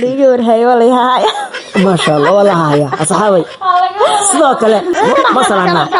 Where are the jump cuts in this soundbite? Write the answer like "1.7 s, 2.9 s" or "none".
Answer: 4.9 s